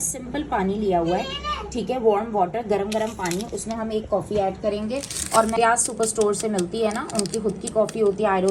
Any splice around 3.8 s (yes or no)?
no